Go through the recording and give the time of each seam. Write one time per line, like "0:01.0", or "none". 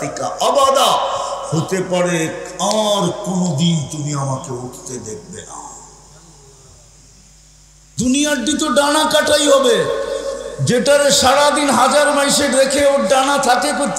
0:07.8

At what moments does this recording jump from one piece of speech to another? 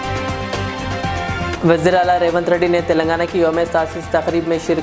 0:01.5

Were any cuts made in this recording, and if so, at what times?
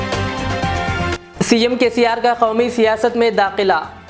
0:01.1

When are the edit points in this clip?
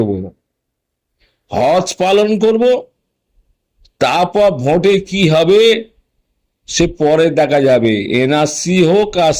none

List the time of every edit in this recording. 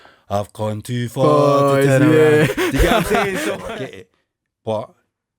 0:03.6

